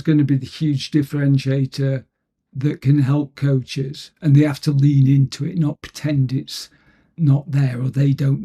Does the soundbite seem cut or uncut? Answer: uncut